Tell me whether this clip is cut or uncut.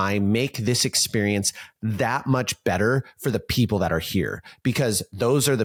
uncut